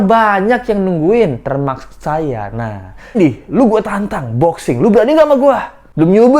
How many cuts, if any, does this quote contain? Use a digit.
1